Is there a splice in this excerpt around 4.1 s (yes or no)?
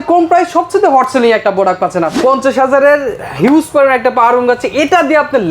no